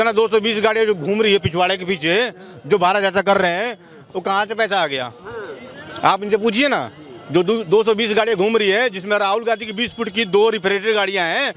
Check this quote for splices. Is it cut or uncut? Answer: uncut